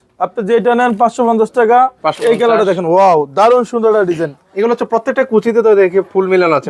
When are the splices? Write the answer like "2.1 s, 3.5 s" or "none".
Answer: 2.2 s